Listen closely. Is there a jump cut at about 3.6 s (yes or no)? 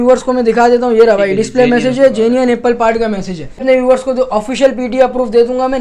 yes